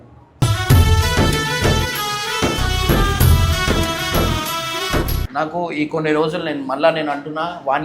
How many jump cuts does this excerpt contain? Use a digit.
1